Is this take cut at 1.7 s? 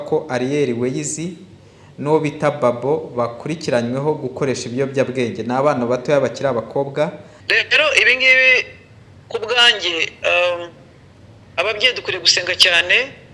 no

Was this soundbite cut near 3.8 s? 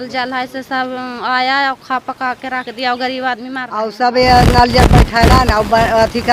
yes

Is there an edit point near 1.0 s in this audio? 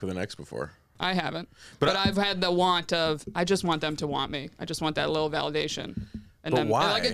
yes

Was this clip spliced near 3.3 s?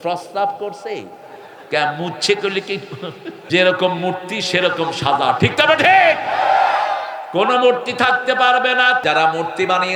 yes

